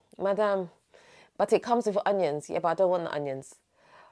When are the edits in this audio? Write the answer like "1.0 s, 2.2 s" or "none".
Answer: none